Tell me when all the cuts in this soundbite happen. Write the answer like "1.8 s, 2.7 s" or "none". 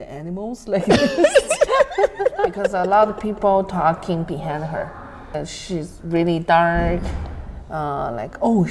2.7 s, 5.4 s

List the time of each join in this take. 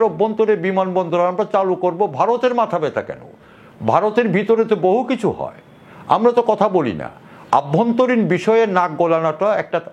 none

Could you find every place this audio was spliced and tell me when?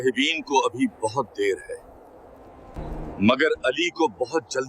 2.8 s

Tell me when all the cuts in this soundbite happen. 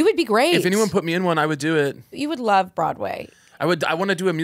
2.1 s

